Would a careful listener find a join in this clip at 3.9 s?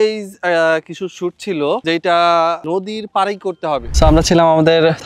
yes; 1 cut; at 3.9 s

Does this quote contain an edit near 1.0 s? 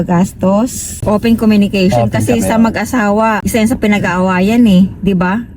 yes; 1 cut; at 1.0 s

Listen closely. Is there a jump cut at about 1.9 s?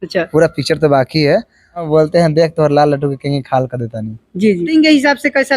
yes; 2 cuts; at 1.9 s, 4.7 s

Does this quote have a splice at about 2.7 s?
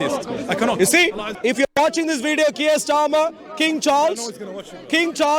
no; 1 cut; at 1.3 s

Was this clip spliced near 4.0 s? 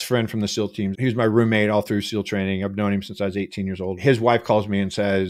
yes; 2 cuts; at 0.9 s, 4.0 s

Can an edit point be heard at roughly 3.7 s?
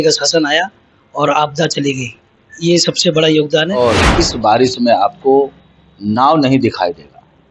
yes; 1 cut; at 3.7 s

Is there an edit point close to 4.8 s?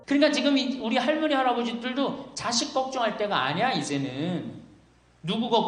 no; 0 cuts

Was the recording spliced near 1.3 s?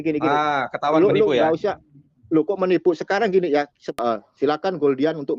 no; 1 cut; at 3.8 s

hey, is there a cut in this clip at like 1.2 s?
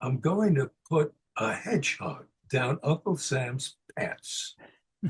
yes; 1 cut; at 1.2 s

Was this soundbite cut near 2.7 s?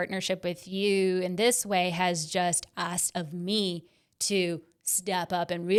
no; 0 cuts

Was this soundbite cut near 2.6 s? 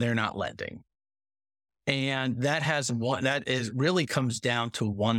no; 0 cuts

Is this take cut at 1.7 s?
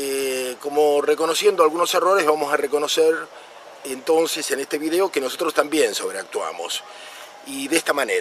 yes; 1 cut; at 1.7 s

